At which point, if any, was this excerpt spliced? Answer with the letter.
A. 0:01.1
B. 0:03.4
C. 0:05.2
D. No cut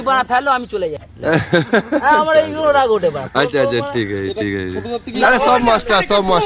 A